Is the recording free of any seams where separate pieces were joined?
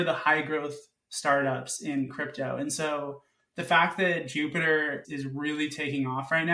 no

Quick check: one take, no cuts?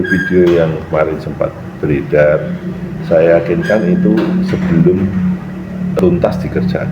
no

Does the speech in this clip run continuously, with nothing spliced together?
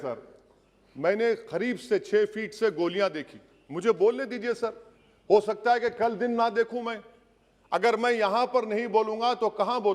yes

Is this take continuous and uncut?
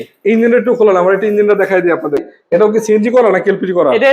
no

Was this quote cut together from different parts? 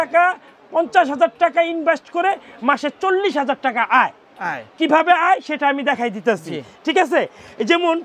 no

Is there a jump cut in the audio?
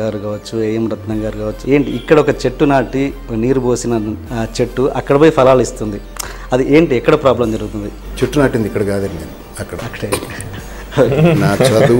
yes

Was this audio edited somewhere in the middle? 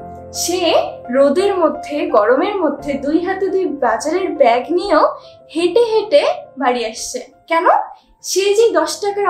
no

